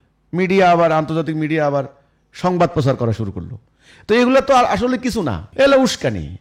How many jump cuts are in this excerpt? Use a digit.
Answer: 0